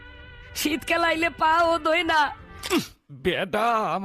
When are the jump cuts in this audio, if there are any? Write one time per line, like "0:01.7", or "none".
0:03.0

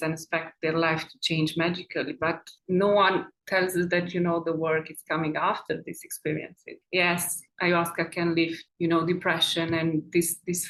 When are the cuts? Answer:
none

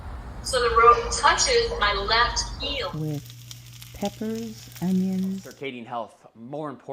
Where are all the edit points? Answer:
none

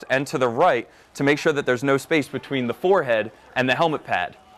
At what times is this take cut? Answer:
none

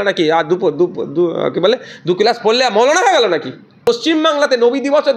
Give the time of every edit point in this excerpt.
0:03.8

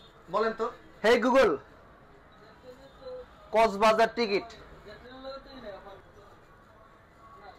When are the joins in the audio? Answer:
0:04.7
0:06.0

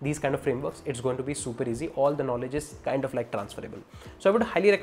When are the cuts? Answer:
none

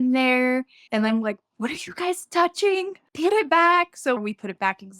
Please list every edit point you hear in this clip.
0:03.0
0:04.2

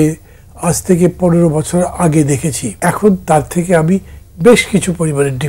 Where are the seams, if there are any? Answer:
0:02.6

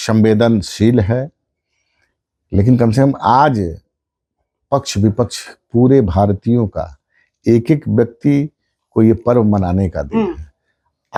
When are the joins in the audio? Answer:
none

